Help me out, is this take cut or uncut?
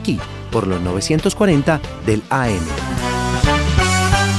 uncut